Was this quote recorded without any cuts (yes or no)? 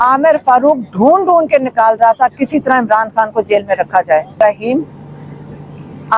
no